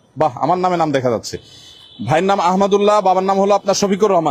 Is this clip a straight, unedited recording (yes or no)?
yes